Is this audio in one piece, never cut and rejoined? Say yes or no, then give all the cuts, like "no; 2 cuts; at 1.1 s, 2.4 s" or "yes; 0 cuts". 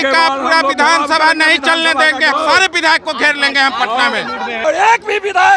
no; 2 cuts; at 2.3 s, 4.6 s